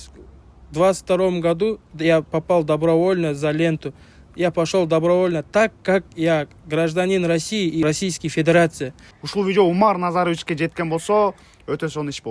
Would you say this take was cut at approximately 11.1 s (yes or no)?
no